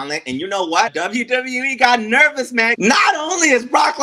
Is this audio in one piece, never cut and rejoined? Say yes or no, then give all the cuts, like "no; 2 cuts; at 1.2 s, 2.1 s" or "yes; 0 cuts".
no; 2 cuts; at 0.9 s, 2.8 s